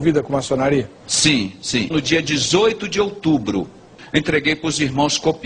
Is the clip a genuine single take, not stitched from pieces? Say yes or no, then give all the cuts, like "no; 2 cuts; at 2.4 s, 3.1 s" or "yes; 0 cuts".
no; 1 cut; at 4.0 s